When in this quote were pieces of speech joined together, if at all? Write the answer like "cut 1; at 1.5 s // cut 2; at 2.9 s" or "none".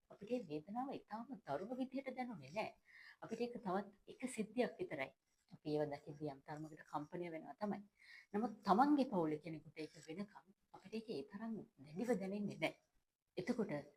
none